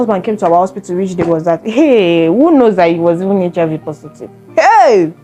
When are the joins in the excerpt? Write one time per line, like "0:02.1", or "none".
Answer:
none